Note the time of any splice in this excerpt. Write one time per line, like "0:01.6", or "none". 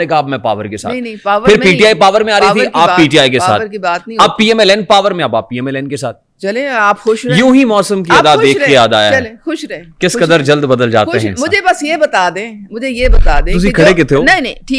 none